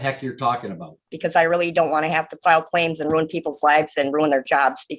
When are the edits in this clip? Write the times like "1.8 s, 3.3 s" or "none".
1.1 s